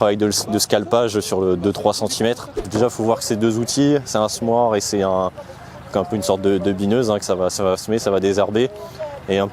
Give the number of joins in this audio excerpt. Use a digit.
1